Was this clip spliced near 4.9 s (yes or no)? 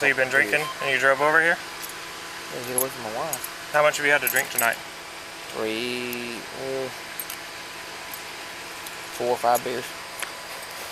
no